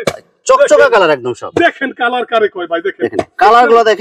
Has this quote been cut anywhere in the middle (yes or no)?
no